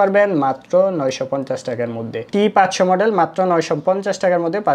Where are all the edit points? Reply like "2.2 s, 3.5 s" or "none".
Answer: none